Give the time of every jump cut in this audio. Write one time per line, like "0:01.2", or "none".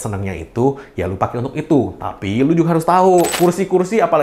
0:03.3